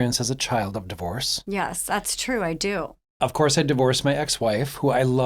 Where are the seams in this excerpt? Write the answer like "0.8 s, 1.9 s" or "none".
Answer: 3.0 s